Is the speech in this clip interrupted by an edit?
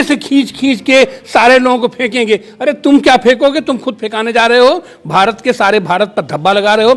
no; 0 cuts

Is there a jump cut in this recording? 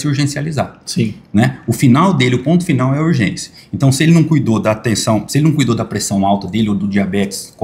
no; 0 cuts

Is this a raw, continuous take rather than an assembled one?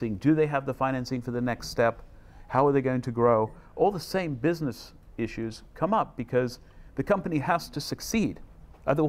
yes; 0 cuts

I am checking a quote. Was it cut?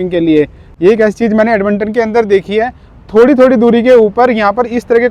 no; 0 cuts

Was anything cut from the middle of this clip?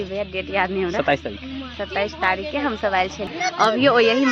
yes; 1 cut; at 3.3 s

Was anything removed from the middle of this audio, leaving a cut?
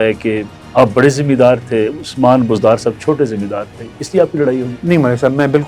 no; 0 cuts

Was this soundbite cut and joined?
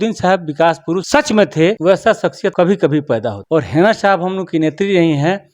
yes; 3 cuts; at 1.0 s, 1.9 s, 3.4 s

